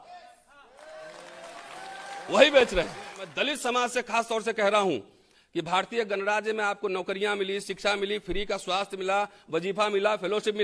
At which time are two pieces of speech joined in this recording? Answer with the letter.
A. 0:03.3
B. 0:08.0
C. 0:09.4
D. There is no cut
A